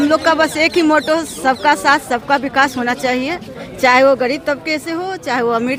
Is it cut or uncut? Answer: uncut